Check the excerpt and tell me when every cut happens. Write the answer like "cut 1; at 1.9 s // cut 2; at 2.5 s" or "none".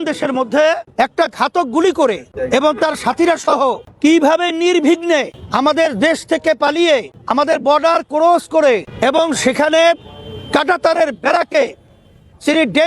cut 1; at 0.8 s // cut 2; at 2.3 s // cut 3; at 3.9 s // cut 4; at 5.4 s // cut 5; at 7.2 s // cut 6; at 8.9 s